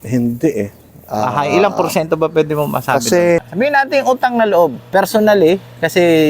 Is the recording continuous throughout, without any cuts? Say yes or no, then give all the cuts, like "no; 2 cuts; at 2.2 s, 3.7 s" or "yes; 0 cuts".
no; 1 cut; at 3.5 s